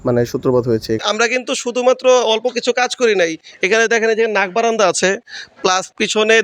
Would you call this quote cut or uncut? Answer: cut